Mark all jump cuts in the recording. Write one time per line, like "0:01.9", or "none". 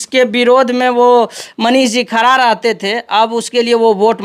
none